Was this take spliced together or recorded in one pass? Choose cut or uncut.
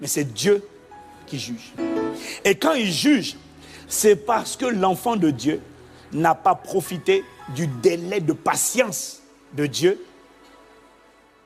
cut